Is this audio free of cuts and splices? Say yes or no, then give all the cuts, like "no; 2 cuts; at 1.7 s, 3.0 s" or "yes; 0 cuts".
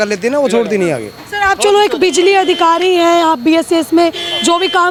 yes; 0 cuts